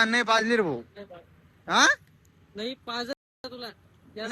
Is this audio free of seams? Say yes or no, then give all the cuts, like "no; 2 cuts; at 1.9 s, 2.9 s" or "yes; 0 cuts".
yes; 0 cuts